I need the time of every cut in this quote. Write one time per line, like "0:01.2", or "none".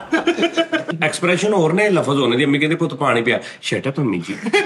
0:00.9